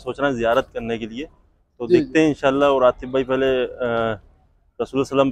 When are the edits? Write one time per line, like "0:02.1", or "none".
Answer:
none